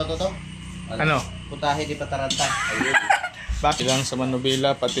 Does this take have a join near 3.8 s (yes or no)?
yes